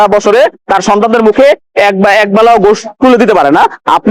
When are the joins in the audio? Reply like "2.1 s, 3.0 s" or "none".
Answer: none